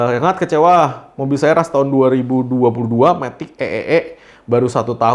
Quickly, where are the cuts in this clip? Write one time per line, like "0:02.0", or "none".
none